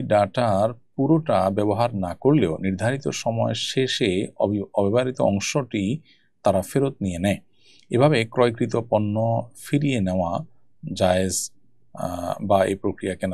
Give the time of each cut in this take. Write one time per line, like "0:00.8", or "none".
none